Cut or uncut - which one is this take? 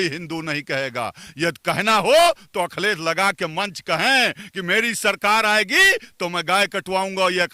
uncut